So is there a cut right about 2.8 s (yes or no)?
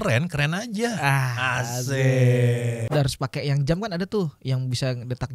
yes